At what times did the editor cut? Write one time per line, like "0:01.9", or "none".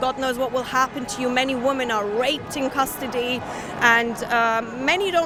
none